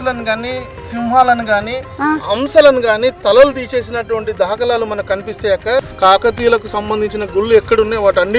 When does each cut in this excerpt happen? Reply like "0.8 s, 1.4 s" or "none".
5.9 s